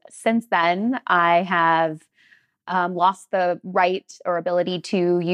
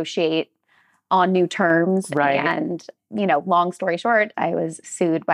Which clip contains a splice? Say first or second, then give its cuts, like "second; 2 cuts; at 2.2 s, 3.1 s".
second; 2 cuts; at 2.9 s, 4.3 s